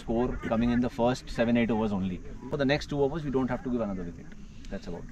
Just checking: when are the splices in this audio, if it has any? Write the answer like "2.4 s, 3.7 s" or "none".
2.5 s